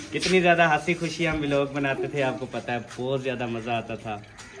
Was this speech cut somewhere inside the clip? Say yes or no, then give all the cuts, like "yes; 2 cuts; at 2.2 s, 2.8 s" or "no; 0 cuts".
no; 0 cuts